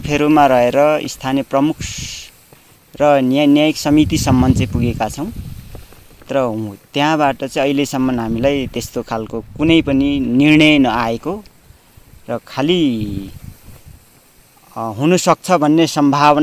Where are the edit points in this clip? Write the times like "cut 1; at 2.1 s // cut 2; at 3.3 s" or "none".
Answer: none